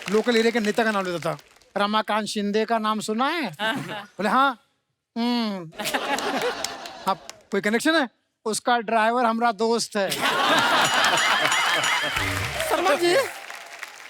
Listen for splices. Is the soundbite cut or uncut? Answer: cut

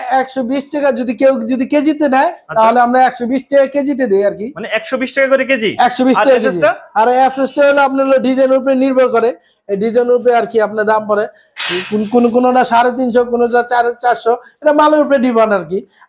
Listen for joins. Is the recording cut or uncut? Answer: uncut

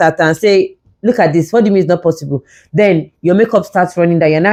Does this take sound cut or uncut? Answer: uncut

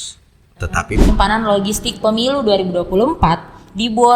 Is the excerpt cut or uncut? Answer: cut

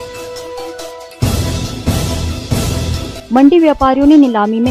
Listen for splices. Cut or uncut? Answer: cut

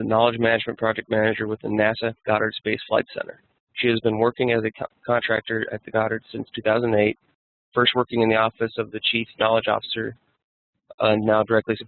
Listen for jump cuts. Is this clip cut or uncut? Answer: cut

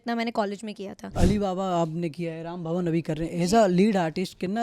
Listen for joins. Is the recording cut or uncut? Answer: cut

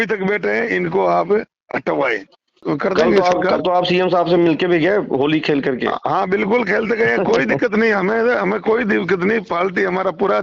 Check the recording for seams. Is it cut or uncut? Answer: cut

